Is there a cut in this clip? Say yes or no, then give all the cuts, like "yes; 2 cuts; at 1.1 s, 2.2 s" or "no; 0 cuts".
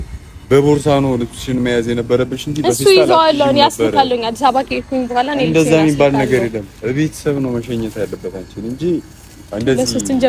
no; 0 cuts